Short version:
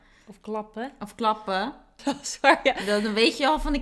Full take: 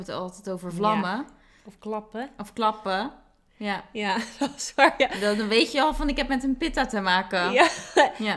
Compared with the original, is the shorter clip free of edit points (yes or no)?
no